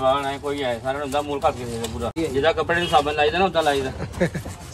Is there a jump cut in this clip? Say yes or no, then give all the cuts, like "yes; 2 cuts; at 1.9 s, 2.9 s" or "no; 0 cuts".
yes; 1 cut; at 2.1 s